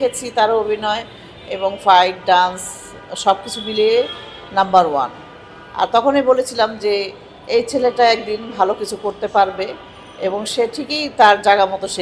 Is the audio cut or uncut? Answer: uncut